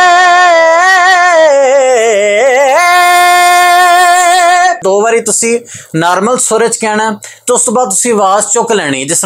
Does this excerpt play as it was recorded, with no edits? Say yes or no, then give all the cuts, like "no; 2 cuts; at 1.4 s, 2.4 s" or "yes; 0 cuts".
no; 1 cut; at 4.8 s